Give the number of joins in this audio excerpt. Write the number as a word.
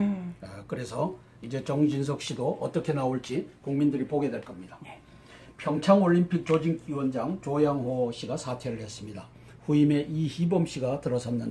one